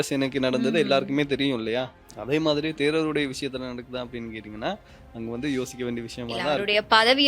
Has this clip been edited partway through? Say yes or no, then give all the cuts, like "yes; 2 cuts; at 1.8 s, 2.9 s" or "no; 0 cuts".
yes; 1 cut; at 1.8 s